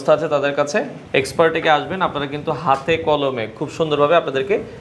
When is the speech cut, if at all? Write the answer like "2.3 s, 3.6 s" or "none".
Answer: 1.0 s